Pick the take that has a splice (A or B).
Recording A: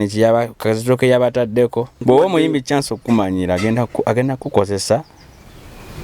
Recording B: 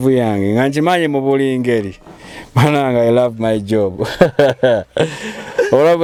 A